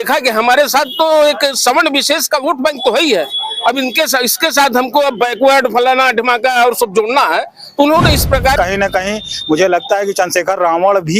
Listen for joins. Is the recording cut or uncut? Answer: cut